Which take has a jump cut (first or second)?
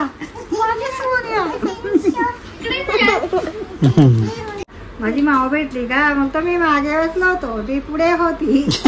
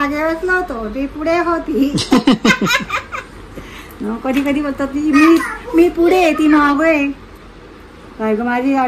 first